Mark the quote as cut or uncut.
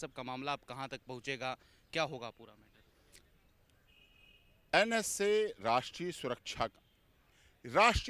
uncut